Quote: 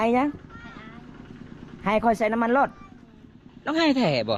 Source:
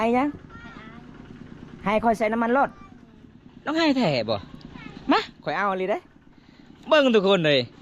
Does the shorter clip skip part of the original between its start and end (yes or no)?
no